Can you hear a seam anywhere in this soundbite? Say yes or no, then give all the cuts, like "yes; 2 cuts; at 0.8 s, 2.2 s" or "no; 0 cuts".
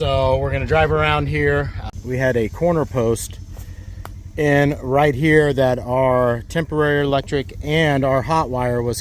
yes; 1 cut; at 1.9 s